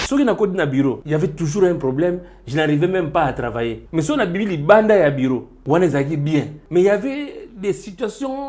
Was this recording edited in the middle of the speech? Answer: yes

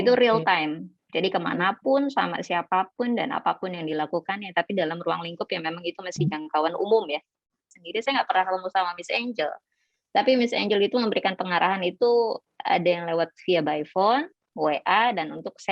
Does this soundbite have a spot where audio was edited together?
yes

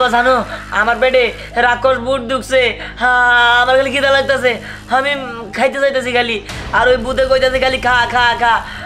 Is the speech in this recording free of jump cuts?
yes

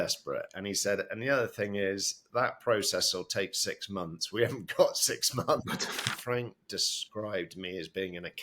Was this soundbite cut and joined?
yes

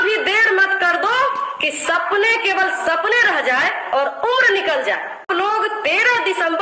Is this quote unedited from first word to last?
no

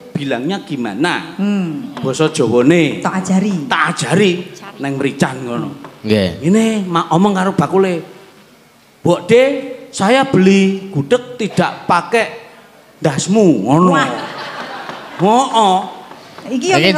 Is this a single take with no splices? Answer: yes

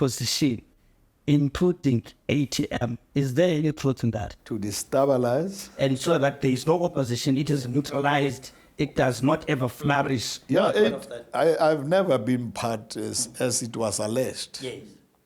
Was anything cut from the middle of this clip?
no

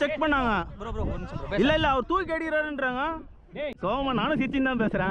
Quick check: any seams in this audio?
yes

